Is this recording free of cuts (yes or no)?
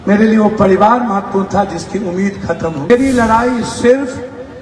no